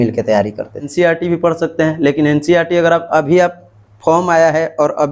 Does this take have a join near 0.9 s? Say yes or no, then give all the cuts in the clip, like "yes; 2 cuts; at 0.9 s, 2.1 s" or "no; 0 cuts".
yes; 1 cut; at 0.9 s